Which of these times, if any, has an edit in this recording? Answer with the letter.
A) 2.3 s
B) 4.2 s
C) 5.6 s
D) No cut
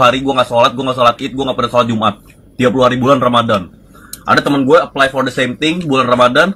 A